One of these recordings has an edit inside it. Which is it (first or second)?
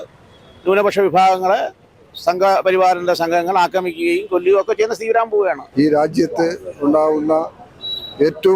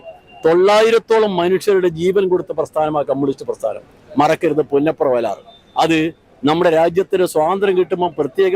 first